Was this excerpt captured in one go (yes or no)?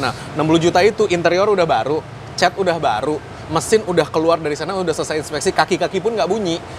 yes